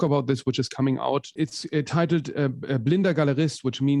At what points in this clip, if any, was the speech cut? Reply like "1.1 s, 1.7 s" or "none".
1.3 s